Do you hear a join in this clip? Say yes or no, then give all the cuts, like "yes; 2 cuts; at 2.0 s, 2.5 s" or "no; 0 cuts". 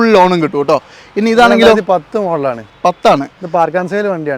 no; 0 cuts